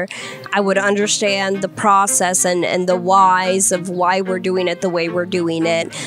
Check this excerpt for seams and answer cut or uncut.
uncut